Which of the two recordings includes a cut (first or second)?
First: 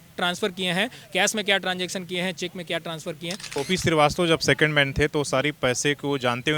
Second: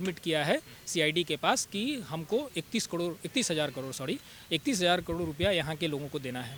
first